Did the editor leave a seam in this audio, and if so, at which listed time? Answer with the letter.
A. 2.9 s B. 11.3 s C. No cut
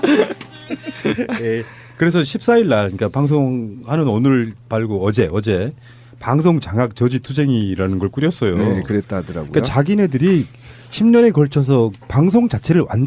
C